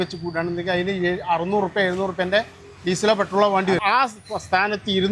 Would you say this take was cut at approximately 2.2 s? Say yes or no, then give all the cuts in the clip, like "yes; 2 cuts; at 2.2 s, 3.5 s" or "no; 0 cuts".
no; 1 cut; at 3.8 s